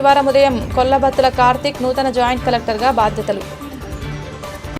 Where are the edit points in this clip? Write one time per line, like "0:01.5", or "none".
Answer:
0:03.8